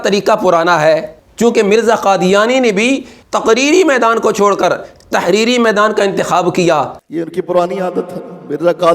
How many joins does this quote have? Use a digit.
2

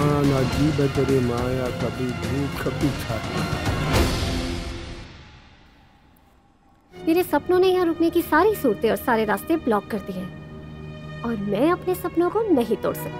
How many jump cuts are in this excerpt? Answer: 1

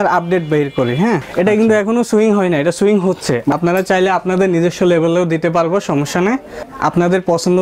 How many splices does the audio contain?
3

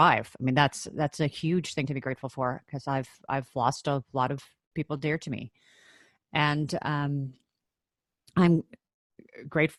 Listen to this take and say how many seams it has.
0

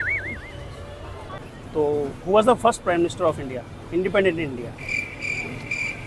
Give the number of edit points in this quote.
1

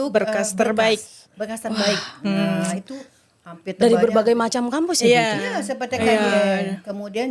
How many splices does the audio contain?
0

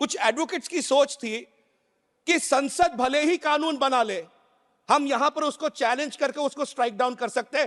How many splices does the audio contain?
0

